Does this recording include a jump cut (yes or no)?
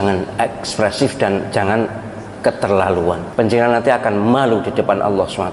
no